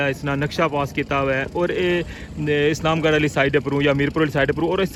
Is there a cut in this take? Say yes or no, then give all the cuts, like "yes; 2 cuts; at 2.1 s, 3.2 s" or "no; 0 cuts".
no; 0 cuts